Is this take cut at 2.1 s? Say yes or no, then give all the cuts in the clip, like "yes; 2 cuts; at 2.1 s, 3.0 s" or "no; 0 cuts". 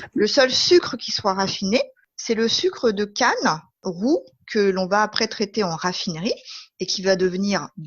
yes; 1 cut; at 2.1 s